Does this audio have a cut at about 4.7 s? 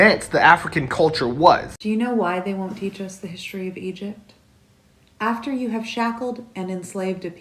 no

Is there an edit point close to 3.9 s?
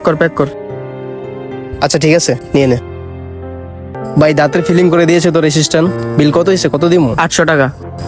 yes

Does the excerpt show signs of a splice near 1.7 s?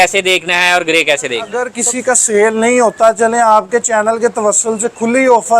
yes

